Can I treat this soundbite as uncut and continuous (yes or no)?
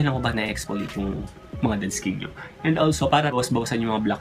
yes